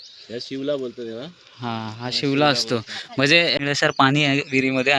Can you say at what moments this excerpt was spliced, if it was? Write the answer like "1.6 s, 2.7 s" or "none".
3.5 s